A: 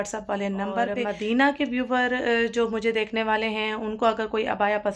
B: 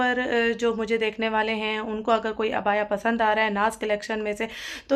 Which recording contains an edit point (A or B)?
A